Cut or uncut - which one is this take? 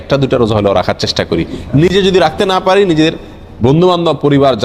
uncut